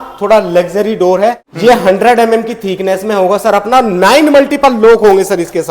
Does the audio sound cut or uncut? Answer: cut